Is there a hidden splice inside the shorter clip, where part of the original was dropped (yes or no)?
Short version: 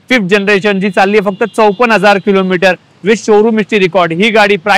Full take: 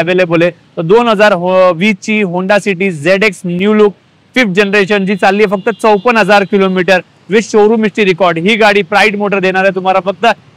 no